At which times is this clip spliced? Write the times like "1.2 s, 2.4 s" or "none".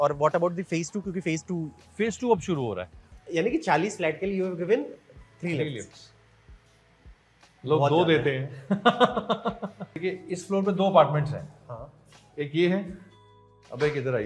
3.0 s, 9.9 s